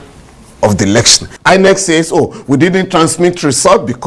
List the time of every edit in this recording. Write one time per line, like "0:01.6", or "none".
0:01.2